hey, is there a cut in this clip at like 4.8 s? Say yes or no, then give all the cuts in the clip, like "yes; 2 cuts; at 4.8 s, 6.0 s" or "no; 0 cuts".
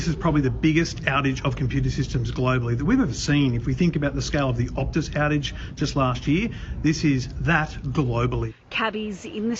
yes; 1 cut; at 4.8 s